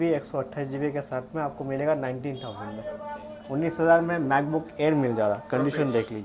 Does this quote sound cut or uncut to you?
uncut